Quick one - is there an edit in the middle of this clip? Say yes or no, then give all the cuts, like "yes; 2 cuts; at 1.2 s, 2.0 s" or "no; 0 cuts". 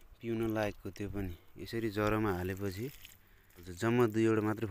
yes; 1 cut; at 3.7 s